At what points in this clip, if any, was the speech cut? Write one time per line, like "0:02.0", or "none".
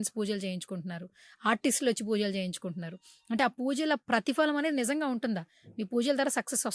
none